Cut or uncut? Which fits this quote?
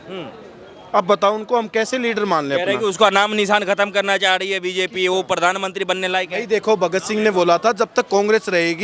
uncut